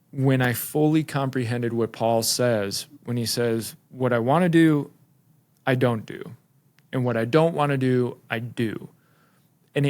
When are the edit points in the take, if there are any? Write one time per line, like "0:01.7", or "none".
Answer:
none